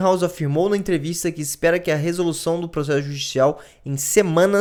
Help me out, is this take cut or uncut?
uncut